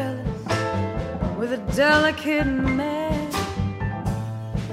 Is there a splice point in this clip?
no; 0 cuts

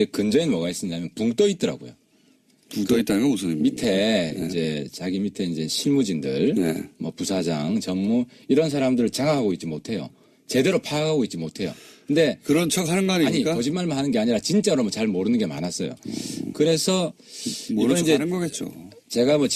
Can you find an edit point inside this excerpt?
no; 0 cuts

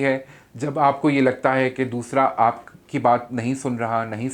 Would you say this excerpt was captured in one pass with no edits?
yes; 0 cuts

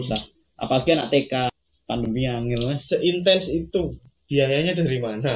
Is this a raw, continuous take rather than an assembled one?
no; 1 cut; at 1.5 s

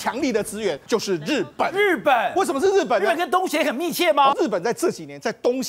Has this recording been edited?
yes; 2 cuts; at 0.8 s, 4.3 s

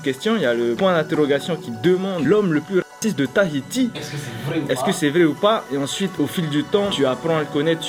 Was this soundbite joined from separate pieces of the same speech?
no; 0 cuts

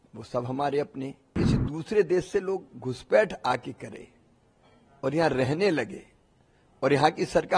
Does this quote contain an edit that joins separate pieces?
yes; 1 cut; at 1.4 s

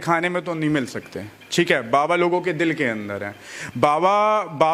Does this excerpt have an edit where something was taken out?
no; 0 cuts

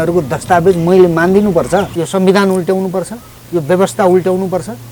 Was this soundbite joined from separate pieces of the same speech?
yes; 1 cut; at 1.9 s

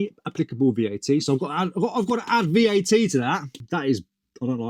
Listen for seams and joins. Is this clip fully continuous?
no; 1 cut; at 3.6 s

